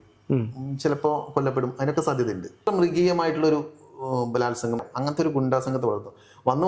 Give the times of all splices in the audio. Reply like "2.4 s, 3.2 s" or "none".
2.7 s, 4.8 s